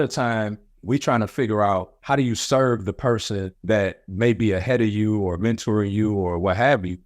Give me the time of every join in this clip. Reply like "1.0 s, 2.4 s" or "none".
1.9 s